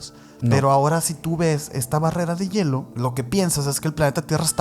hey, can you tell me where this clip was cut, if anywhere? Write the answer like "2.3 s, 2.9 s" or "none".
2.9 s